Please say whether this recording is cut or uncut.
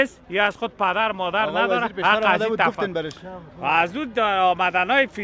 uncut